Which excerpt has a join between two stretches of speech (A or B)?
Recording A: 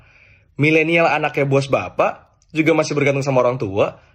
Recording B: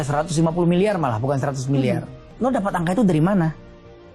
B